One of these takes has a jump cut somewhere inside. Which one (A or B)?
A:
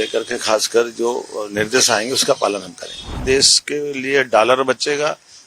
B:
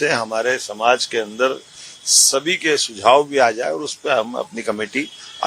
A